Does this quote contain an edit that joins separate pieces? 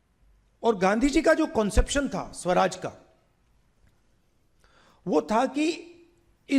no; 0 cuts

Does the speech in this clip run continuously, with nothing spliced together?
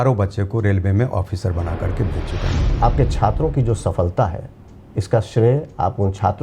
no; 1 cut; at 2.7 s

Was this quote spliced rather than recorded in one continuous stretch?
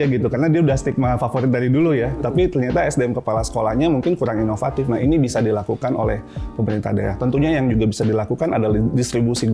no; 0 cuts

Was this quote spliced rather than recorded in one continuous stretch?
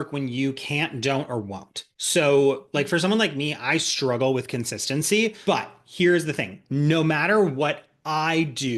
yes; 1 cut; at 5.4 s

